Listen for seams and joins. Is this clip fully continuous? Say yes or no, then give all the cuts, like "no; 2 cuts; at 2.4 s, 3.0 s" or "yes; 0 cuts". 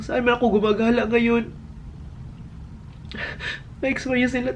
yes; 0 cuts